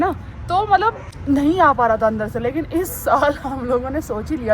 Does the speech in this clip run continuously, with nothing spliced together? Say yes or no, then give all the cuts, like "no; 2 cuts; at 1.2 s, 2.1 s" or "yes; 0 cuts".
no; 1 cut; at 1.1 s